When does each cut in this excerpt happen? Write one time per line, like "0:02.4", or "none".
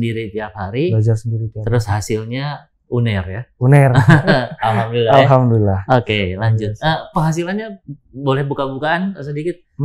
none